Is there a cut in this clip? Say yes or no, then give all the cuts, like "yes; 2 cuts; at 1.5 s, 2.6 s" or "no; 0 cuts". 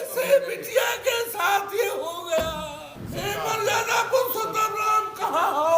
yes; 1 cut; at 3.0 s